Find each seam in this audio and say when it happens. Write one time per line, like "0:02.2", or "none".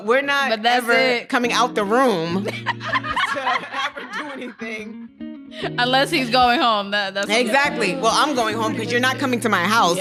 none